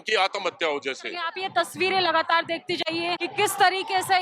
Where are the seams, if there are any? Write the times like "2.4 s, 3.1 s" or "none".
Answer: 1.4 s, 3.2 s